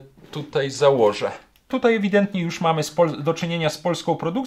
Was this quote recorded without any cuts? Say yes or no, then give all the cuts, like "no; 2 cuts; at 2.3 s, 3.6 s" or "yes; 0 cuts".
no; 1 cut; at 1.7 s